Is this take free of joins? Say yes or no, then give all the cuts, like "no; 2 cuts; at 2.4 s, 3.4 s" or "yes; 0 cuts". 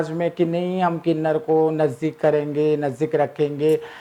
yes; 0 cuts